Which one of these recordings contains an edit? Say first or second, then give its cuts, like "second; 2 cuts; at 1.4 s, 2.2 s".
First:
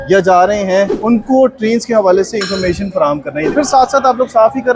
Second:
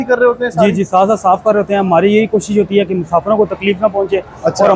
first; 2 cuts; at 1.0 s, 3.5 s